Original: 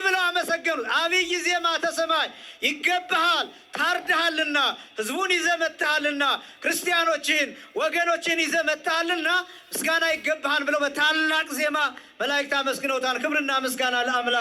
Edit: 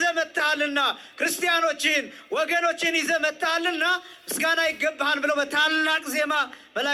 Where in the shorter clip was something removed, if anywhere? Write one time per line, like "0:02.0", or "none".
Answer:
none